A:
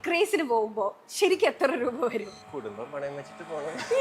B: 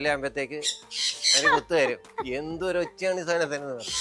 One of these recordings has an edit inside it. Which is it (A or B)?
A